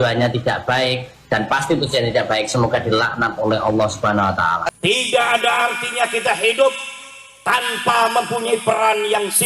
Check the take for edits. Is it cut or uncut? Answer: cut